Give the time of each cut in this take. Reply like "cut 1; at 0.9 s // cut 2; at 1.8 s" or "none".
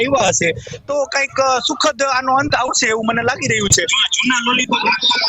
cut 1; at 4.0 s